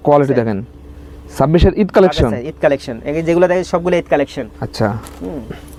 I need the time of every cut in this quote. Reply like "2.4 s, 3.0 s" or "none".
none